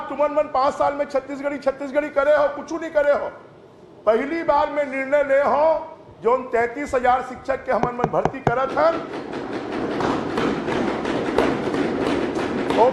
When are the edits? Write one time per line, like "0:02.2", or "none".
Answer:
none